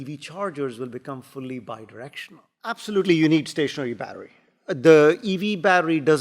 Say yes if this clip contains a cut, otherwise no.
yes